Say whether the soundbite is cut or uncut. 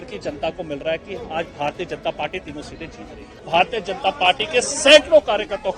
cut